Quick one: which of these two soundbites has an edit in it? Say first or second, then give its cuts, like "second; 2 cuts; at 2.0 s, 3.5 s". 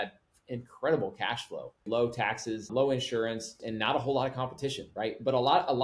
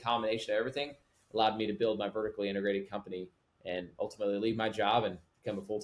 first; 3 cuts; at 1.8 s, 2.7 s, 3.6 s